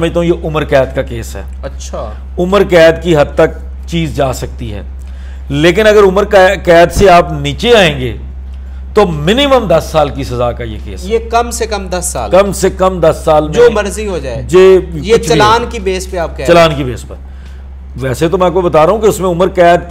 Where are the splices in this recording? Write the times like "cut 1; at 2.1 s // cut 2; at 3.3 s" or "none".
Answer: none